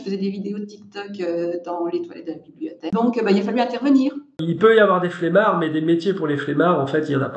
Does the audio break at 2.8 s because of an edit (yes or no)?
yes